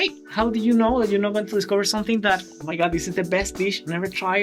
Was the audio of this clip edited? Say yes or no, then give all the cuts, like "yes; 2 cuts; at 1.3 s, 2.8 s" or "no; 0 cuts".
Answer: no; 0 cuts